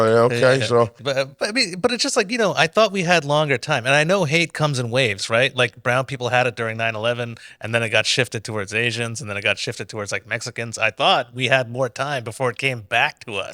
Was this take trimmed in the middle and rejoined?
yes; 1 cut; at 1.0 s

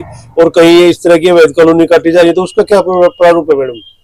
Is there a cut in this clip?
no; 0 cuts

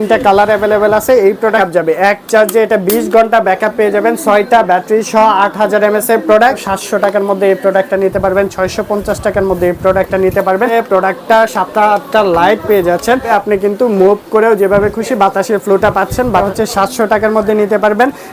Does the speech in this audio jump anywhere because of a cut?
yes; 5 cuts; at 1.6 s, 6.7 s, 10.7 s, 13.3 s, 16.5 s

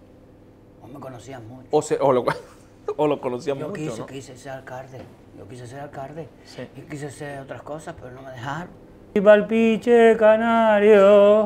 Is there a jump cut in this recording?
yes; 1 cut; at 9.2 s

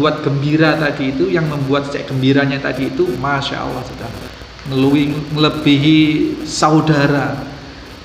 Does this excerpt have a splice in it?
no; 0 cuts

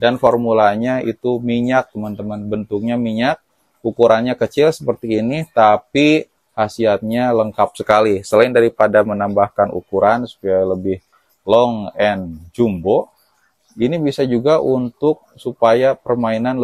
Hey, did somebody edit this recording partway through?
no; 0 cuts

